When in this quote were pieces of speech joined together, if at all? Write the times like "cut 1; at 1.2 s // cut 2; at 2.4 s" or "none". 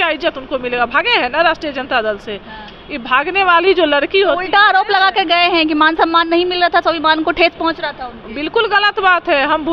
none